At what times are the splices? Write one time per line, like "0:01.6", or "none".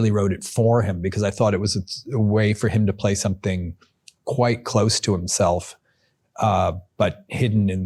none